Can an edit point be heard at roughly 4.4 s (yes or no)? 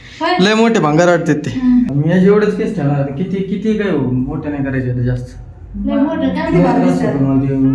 no